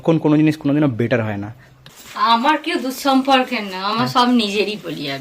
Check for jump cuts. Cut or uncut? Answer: cut